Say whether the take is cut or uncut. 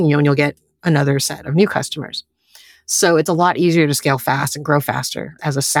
uncut